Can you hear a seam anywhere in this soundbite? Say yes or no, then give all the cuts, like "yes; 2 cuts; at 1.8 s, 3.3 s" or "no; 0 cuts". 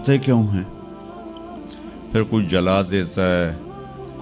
no; 0 cuts